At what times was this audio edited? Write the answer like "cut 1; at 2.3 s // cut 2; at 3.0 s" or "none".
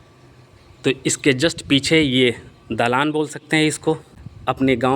cut 1; at 3.8 s